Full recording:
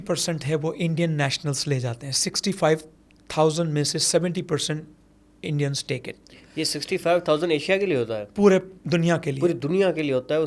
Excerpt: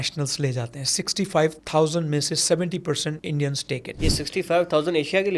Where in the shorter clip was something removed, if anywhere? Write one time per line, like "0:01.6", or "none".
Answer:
0:01.6
0:03.2
0:03.9